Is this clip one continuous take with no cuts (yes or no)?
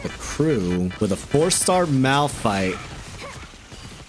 no